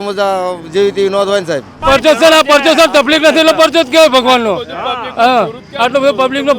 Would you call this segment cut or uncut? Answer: cut